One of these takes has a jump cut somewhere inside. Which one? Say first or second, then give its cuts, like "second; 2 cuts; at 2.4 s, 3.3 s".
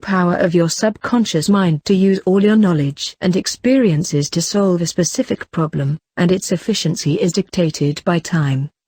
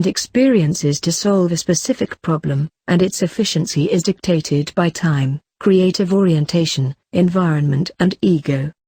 second; 1 cut; at 7.8 s